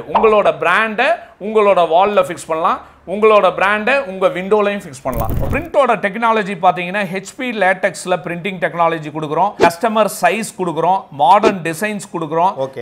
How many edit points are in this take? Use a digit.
2